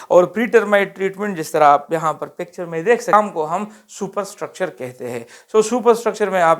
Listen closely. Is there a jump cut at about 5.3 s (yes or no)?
no